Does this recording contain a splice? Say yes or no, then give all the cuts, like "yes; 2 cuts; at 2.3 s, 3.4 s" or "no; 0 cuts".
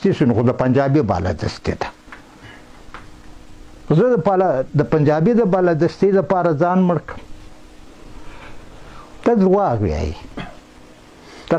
no; 0 cuts